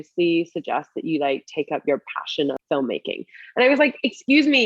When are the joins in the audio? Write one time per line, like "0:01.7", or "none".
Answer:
0:02.6